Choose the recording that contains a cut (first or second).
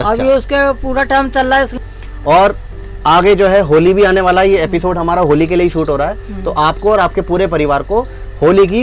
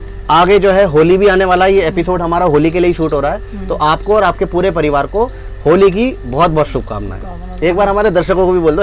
first